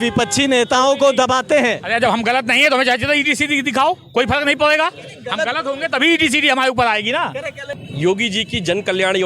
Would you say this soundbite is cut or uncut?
cut